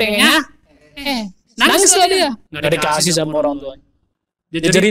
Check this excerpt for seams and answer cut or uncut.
cut